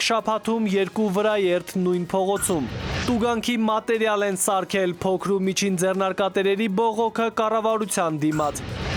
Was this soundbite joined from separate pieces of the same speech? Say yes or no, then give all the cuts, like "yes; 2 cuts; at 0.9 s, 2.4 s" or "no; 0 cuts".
no; 0 cuts